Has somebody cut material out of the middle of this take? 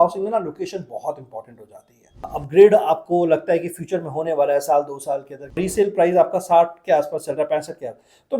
yes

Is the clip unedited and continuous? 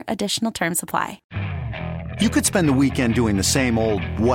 no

